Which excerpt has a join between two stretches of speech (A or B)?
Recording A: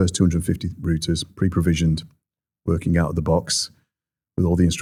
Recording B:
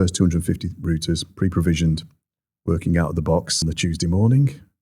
B